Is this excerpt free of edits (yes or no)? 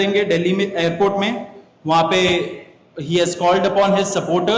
yes